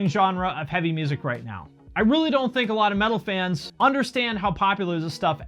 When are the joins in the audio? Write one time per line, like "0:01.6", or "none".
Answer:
0:03.6